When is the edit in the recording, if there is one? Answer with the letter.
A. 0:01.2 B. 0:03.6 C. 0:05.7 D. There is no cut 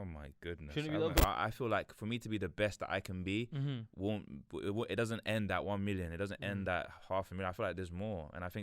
A